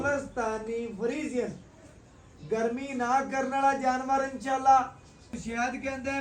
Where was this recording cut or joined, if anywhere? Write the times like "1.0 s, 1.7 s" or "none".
5.3 s